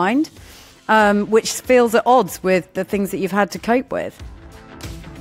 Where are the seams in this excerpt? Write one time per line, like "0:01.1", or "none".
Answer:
0:04.1